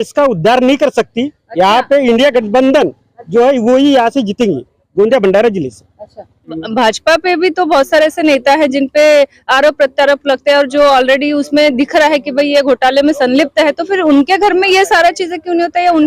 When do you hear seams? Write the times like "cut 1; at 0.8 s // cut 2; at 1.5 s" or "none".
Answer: cut 1; at 6.6 s